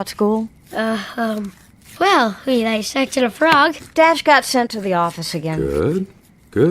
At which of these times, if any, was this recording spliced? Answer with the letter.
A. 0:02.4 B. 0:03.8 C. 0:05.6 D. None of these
B